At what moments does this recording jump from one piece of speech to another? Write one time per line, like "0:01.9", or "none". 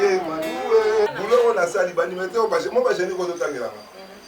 0:01.1